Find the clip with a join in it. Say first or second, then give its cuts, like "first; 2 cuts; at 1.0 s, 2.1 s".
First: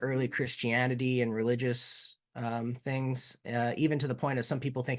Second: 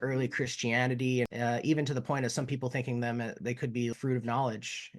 second; 2 cuts; at 1.3 s, 3.9 s